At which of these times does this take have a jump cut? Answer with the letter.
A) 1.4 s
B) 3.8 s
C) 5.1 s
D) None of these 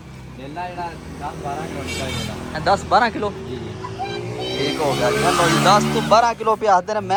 D